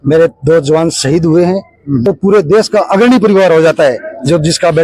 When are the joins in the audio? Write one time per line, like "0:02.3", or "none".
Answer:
0:02.0

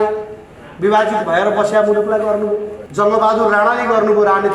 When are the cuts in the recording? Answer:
0:02.8

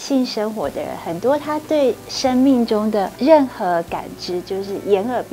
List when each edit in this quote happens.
0:03.1

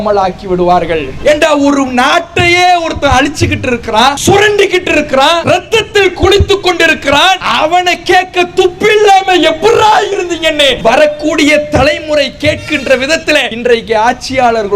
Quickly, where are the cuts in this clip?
0:01.1
0:04.2
0:05.4
0:07.5
0:10.8
0:13.5

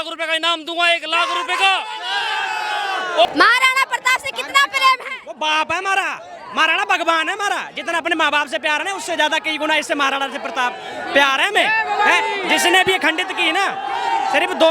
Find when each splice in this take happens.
0:03.3

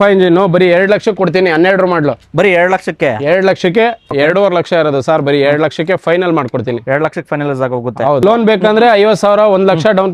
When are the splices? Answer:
0:04.1
0:08.2

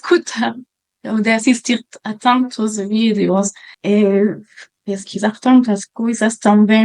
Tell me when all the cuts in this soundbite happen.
0:03.7

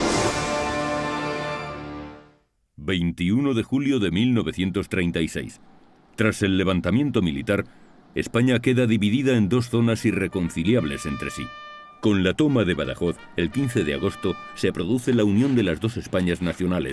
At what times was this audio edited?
0:14.6

